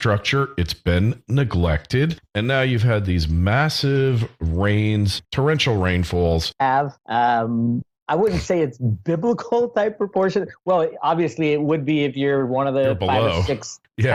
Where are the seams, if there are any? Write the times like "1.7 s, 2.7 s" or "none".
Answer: none